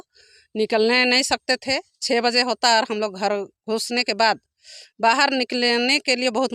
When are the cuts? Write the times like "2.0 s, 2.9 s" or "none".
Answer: none